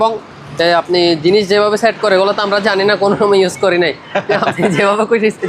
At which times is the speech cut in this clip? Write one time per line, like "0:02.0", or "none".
none